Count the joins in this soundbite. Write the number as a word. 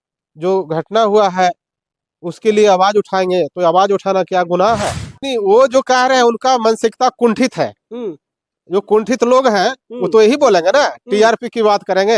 one